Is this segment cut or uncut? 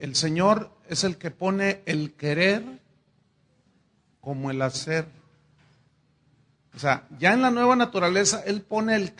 cut